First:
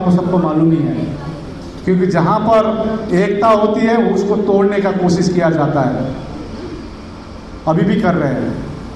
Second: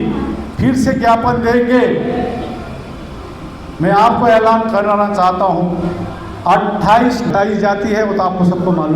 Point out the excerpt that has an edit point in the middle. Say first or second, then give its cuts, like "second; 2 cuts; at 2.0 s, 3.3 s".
second; 1 cut; at 7.3 s